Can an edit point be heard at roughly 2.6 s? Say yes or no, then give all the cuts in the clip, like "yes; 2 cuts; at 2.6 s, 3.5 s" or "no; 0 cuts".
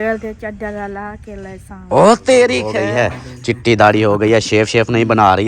yes; 1 cut; at 2.6 s